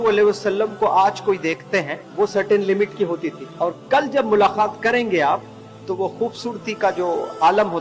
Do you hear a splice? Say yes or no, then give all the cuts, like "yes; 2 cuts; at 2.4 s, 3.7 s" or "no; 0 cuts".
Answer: yes; 2 cuts; at 2.0 s, 3.4 s